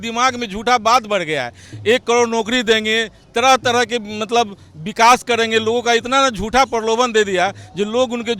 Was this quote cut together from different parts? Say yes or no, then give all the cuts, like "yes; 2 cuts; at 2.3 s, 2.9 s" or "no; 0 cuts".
no; 0 cuts